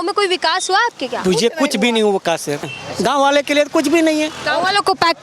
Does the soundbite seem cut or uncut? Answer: cut